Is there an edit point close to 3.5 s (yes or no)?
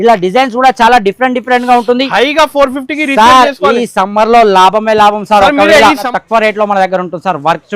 no